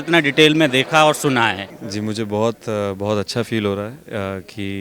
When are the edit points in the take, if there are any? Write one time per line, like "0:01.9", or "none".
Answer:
0:01.7

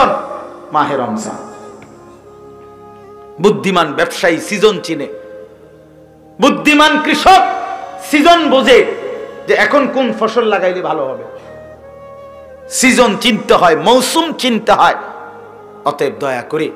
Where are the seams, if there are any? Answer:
none

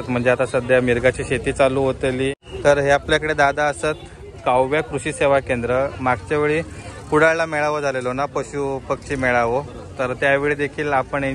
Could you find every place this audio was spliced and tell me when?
0:02.4

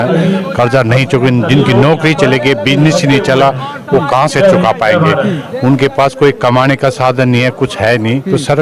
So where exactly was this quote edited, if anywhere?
none

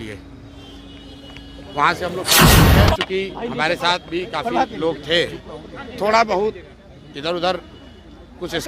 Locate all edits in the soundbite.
0:02.2
0:03.0

